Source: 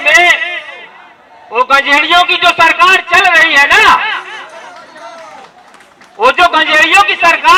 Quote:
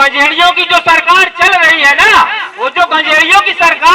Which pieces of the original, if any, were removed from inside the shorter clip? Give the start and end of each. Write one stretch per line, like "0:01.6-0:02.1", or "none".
0:04.2-0:06.1